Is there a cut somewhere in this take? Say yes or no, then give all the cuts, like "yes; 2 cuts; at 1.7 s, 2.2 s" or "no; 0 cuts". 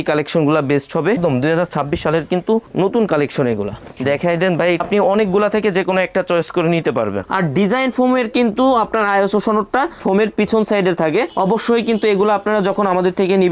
yes; 3 cuts; at 1.2 s, 4.8 s, 7.3 s